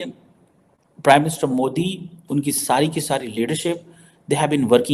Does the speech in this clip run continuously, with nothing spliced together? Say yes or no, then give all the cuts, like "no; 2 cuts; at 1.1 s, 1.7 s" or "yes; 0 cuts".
yes; 0 cuts